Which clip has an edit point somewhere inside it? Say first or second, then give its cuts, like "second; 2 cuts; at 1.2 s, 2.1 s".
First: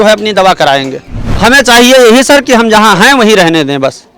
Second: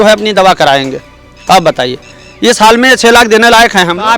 first; 1 cut; at 1.2 s